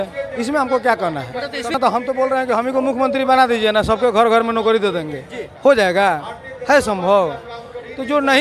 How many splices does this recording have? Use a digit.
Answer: 1